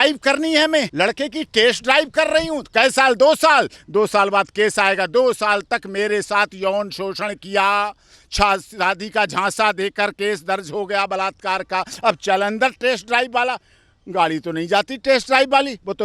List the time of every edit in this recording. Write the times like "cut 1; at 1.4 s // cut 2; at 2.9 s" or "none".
cut 1; at 0.9 s